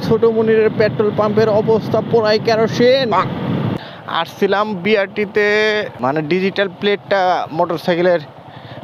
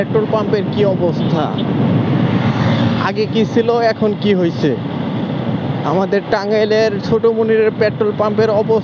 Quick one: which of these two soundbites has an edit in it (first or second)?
first